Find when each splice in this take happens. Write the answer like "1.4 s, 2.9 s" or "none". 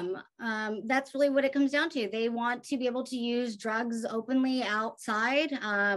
none